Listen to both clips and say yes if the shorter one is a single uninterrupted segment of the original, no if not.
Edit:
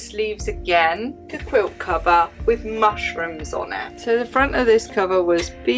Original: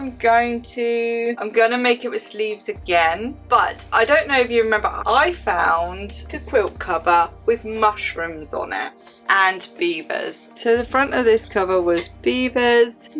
no